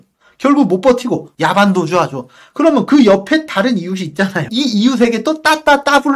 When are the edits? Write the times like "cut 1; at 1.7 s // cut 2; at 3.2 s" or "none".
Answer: cut 1; at 4.5 s